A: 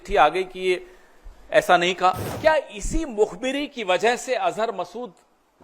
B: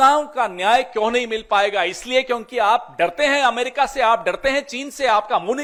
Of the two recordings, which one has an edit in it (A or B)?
A